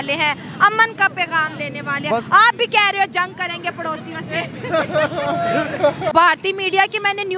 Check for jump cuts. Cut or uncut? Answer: cut